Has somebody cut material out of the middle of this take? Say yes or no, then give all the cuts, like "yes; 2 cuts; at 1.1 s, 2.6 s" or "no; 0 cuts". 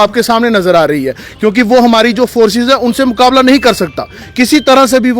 no; 0 cuts